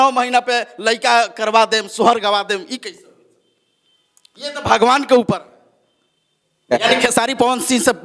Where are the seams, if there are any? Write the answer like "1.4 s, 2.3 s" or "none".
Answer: 6.7 s